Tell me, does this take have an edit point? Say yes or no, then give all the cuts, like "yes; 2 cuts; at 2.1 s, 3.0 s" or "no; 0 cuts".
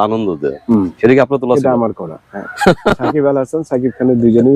no; 0 cuts